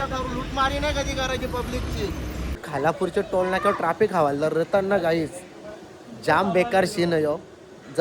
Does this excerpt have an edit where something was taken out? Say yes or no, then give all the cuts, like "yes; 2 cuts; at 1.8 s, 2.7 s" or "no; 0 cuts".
yes; 1 cut; at 2.7 s